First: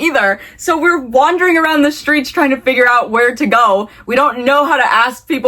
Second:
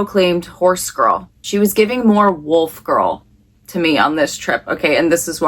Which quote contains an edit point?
second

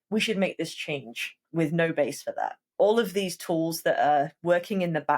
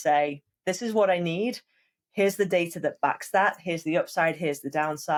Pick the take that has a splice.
first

